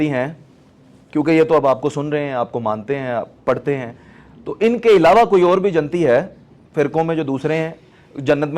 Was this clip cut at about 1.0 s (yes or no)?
no